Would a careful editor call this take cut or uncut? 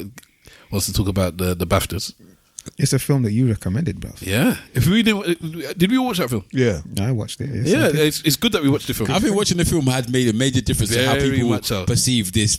uncut